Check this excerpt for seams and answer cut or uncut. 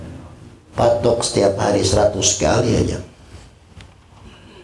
uncut